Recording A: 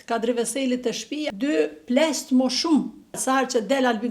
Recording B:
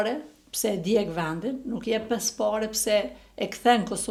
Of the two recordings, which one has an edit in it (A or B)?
A